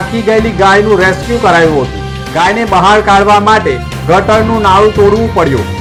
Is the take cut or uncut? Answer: uncut